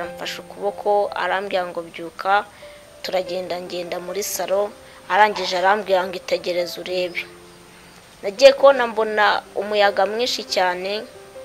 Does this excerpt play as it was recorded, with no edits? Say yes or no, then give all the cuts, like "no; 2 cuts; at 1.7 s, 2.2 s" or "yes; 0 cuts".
yes; 0 cuts